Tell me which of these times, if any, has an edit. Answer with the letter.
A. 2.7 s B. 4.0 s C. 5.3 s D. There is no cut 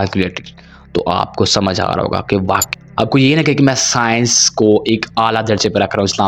A